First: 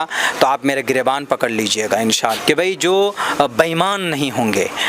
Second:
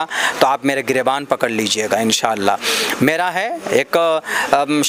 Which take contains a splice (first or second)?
first